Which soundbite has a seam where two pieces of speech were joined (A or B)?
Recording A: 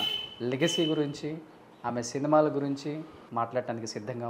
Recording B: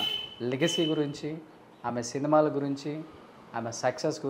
A